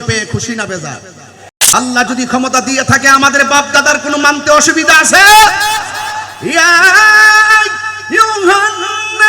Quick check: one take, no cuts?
no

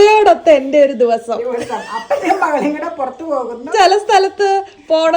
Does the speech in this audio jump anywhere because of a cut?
yes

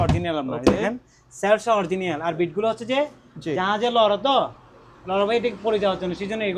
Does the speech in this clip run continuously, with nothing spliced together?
yes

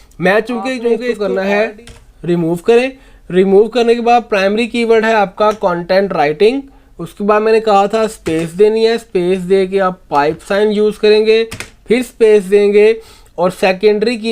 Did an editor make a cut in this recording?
yes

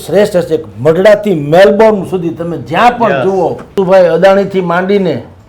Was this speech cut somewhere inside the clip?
yes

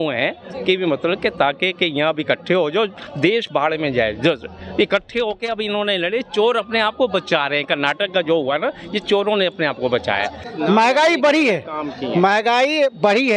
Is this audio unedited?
no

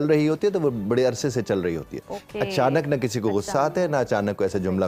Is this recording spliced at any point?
no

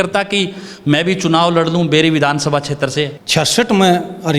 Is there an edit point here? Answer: yes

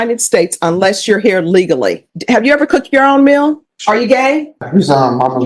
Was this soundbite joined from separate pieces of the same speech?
yes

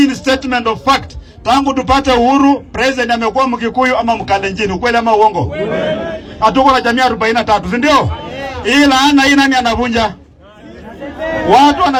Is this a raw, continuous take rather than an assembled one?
yes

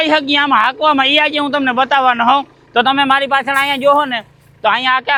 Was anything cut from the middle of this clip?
no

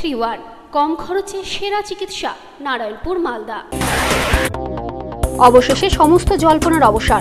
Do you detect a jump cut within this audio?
yes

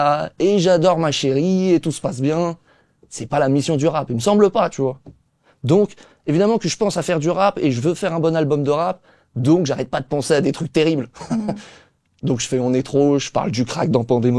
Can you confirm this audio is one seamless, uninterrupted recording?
yes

